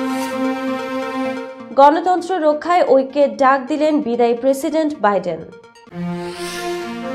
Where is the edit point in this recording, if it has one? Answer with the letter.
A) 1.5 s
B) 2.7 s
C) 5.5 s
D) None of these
A